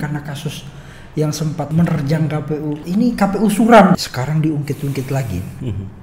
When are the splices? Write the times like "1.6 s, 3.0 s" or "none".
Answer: 1.7 s, 2.8 s, 4.0 s